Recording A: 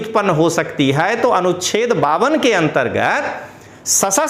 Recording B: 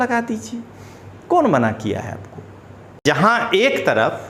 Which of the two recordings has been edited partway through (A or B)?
B